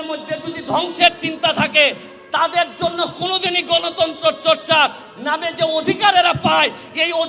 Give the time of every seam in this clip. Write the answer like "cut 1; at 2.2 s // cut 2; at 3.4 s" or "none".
none